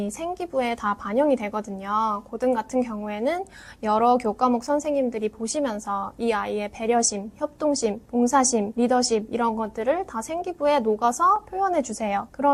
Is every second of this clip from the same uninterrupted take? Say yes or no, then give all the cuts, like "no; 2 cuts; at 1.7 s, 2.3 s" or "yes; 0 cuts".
yes; 0 cuts